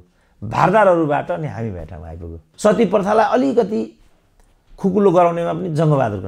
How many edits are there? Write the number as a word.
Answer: one